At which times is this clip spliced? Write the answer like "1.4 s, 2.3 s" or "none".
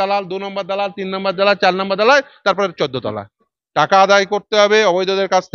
3.6 s